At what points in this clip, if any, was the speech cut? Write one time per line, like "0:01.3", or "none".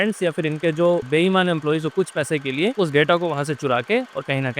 0:01.0
0:02.7